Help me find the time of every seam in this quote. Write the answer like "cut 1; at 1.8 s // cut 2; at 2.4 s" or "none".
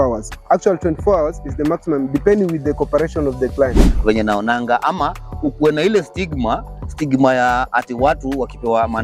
cut 1; at 3.9 s